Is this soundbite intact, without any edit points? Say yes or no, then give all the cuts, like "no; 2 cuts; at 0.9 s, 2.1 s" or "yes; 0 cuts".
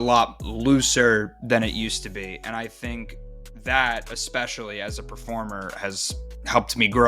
yes; 0 cuts